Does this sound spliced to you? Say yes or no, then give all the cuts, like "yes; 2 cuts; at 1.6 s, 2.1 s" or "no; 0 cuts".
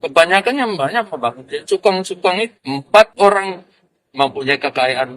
yes; 1 cut; at 2.6 s